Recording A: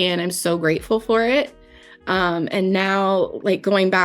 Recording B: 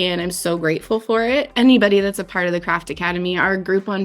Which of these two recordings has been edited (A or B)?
B